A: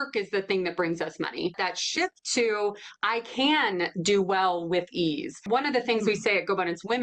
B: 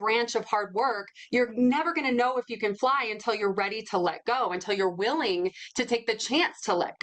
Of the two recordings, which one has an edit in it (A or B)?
A